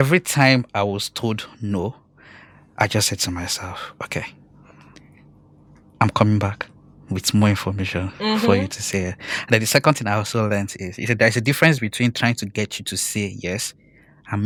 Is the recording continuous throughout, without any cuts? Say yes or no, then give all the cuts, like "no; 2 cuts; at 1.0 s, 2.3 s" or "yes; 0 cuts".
yes; 0 cuts